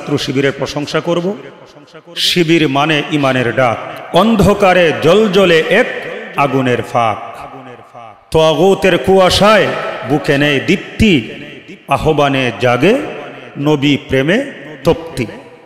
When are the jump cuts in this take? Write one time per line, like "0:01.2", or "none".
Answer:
0:10.0